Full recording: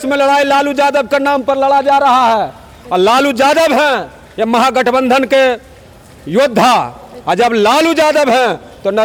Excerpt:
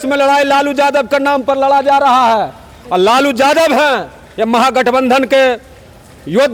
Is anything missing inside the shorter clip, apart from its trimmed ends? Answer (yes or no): no